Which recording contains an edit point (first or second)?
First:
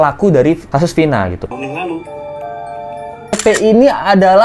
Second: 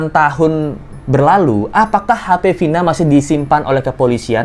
first